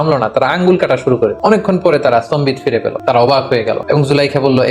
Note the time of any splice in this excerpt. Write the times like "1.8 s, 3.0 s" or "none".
1.4 s, 2.9 s, 3.8 s

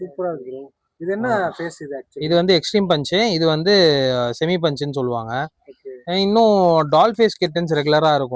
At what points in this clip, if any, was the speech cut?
none

